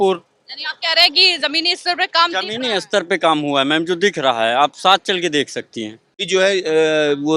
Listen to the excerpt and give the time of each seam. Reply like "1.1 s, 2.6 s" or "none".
6.2 s